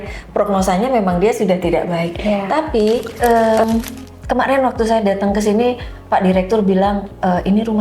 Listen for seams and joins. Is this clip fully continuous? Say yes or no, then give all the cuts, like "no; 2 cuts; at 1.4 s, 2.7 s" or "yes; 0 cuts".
no; 1 cut; at 3.1 s